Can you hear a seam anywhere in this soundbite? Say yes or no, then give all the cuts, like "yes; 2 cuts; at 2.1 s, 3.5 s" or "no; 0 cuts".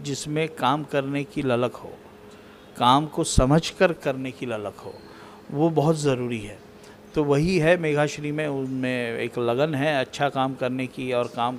no; 0 cuts